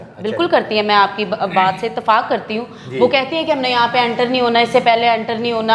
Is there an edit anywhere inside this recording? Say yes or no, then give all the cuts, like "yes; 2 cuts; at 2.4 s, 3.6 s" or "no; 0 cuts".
no; 0 cuts